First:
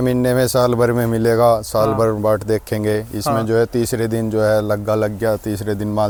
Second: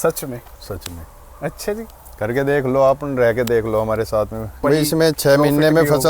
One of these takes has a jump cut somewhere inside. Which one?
second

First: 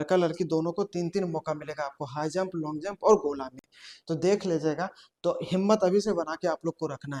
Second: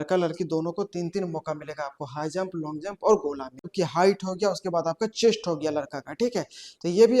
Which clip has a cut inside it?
second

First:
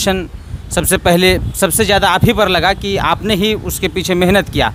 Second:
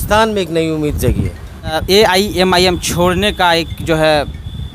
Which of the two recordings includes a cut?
second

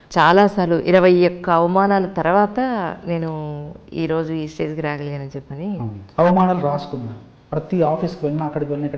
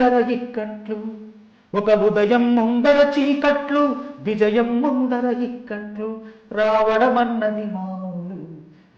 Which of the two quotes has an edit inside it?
first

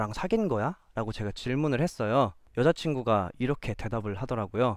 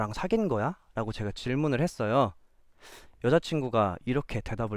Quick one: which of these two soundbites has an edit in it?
first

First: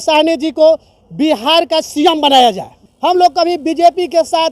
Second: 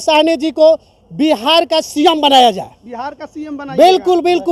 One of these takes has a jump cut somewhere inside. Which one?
first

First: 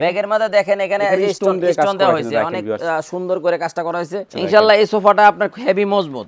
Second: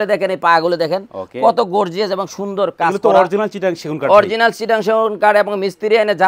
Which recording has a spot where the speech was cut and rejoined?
first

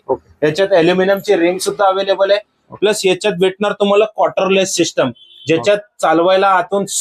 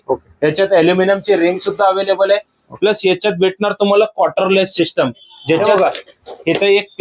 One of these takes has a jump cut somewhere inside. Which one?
second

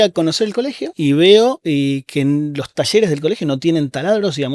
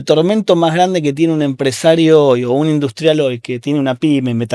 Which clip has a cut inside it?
first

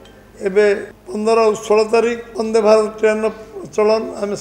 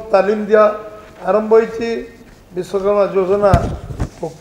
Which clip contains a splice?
first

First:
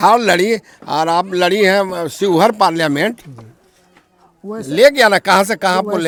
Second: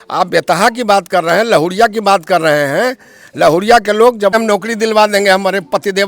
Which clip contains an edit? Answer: second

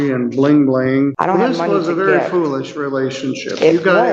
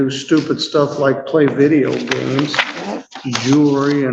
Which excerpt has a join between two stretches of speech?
first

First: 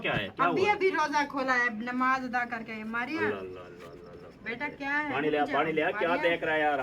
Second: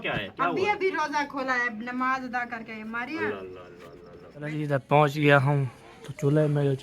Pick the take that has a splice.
second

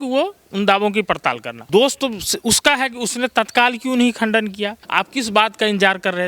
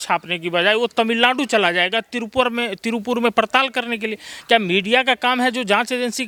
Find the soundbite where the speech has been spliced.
first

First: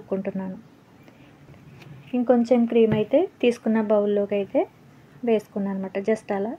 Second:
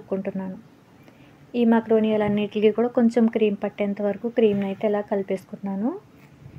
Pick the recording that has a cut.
first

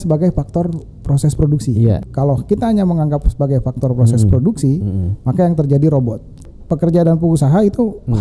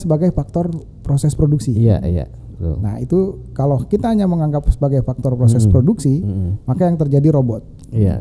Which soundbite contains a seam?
first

